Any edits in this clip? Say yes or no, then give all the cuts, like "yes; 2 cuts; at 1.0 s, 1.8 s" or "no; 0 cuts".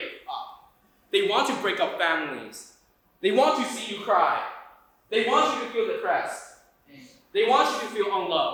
no; 0 cuts